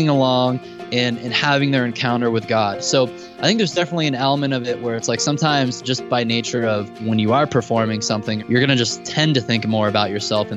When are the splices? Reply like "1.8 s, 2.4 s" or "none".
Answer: 7.0 s, 8.4 s, 9.1 s